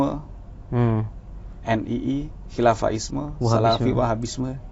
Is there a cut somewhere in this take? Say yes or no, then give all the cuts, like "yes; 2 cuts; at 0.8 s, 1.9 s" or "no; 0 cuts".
no; 0 cuts